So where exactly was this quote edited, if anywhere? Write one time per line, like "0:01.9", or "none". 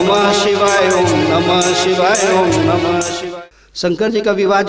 0:03.2